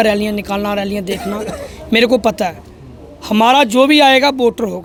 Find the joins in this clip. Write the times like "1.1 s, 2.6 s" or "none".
none